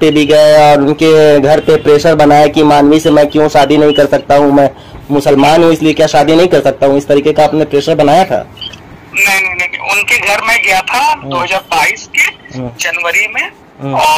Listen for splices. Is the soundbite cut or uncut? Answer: uncut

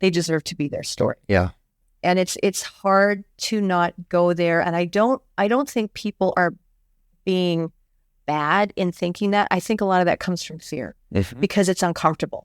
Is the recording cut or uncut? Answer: uncut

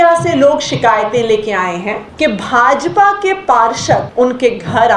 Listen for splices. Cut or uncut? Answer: cut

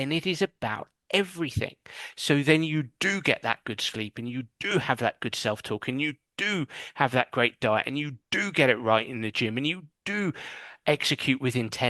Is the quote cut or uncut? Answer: uncut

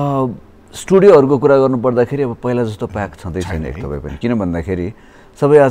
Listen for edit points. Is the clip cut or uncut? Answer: uncut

